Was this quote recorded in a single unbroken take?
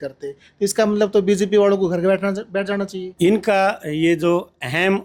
no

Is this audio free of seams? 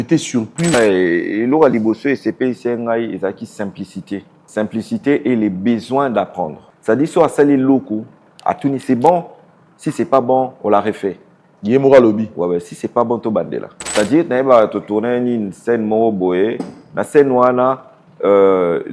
no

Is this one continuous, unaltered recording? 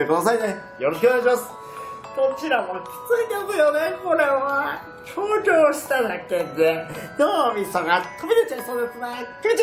no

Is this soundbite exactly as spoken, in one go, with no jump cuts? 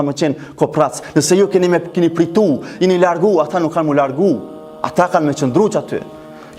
yes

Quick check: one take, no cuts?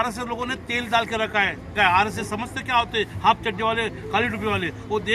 no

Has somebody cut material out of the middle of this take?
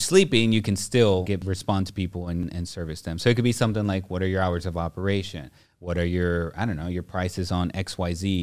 yes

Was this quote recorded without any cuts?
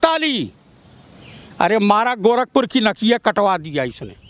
yes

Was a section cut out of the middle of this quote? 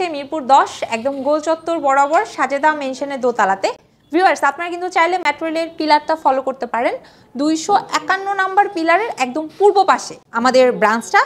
no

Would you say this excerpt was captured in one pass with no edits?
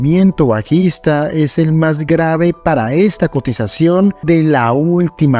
no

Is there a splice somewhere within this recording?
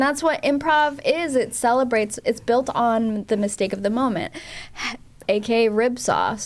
no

